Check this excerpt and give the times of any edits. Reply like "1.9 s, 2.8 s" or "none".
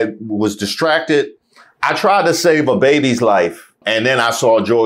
3.8 s